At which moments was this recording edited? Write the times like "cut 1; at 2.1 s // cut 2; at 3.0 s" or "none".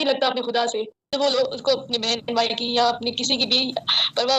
cut 1; at 1.4 s